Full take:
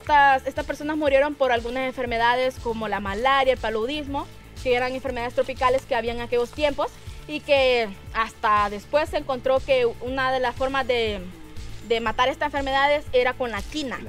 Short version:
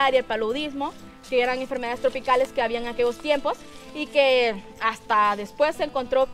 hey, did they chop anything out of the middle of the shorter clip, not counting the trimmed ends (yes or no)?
no